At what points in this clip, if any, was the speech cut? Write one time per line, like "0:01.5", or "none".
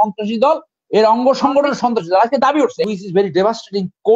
0:02.8